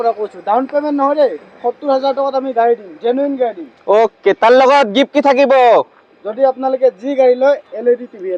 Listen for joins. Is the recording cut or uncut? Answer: uncut